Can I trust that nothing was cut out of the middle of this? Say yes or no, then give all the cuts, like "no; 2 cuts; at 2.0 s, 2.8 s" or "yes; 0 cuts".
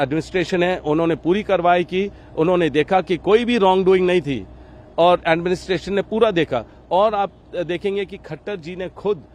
yes; 0 cuts